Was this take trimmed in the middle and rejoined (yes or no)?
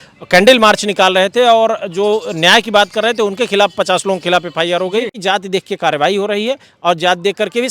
yes